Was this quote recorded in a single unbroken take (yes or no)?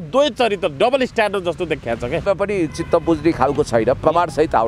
no